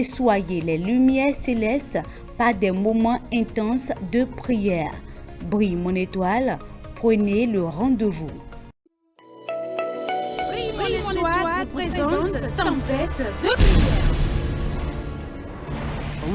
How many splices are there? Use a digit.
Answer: 1